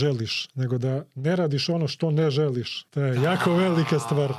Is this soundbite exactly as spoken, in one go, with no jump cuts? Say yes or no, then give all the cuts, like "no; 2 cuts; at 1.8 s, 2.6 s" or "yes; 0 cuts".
no; 1 cut; at 2.8 s